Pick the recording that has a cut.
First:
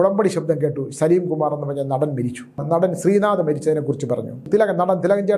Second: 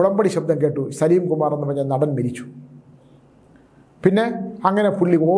first; 2 cuts; at 2.6 s, 4.4 s

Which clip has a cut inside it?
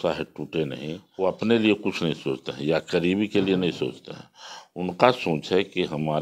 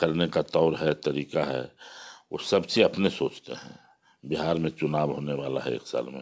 first; 1 cut; at 1.0 s

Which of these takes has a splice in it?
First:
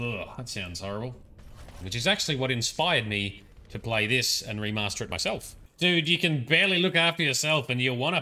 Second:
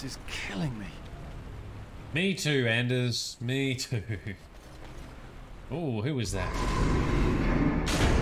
first; 2 cuts; at 1.8 s, 5.6 s

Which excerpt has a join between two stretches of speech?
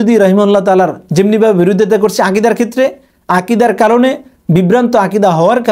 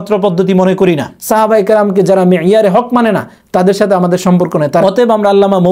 second; 2 cuts; at 1.2 s, 4.8 s

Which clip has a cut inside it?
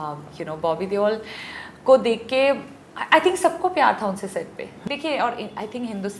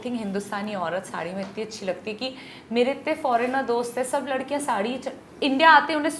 first; 1 cut; at 4.7 s

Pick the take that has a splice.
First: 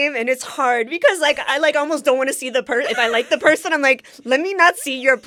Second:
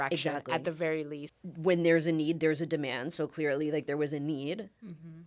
second; 1 cut; at 1.2 s

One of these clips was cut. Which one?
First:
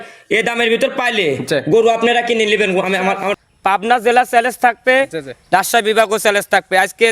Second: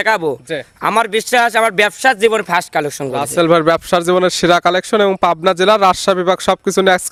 first; 1 cut; at 3.3 s

